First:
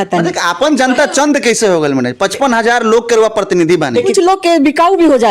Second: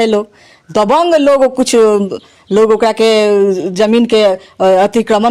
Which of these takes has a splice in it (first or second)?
first